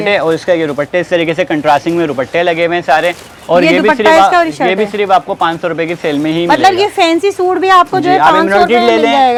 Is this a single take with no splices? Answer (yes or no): yes